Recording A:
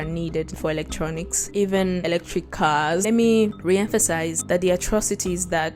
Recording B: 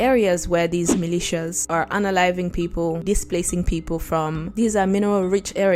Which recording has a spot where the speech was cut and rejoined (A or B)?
A